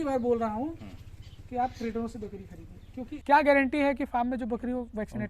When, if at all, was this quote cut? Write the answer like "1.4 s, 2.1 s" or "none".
3.1 s